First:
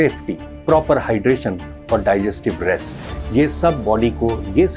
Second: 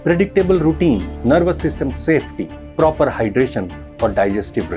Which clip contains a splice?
second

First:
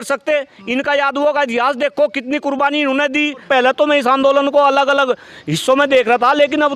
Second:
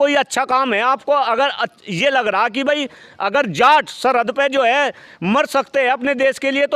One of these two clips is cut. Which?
first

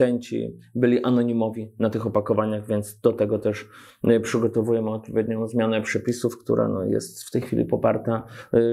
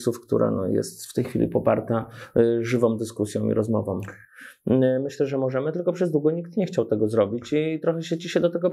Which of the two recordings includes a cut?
second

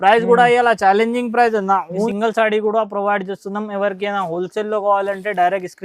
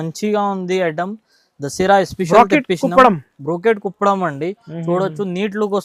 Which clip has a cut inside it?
first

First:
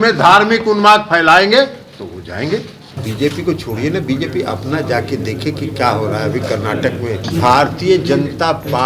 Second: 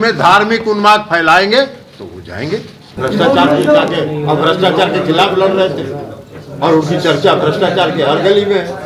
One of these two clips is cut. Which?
first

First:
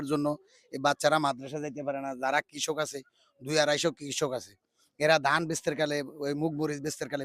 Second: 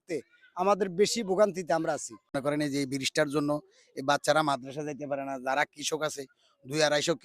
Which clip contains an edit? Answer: second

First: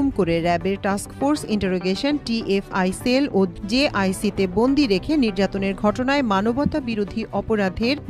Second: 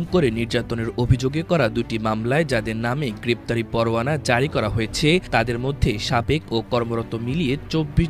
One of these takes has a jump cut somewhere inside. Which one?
first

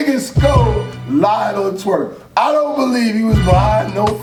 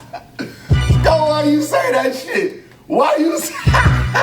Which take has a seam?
second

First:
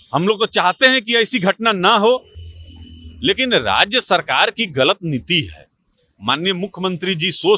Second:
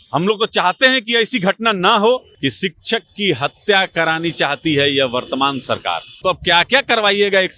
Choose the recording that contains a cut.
second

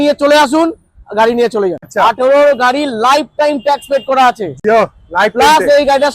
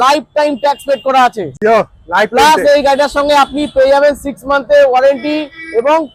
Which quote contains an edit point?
first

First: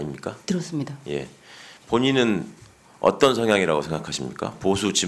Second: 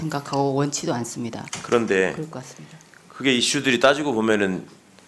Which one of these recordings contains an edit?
second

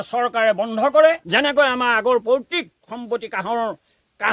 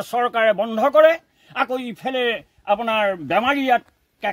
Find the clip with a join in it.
first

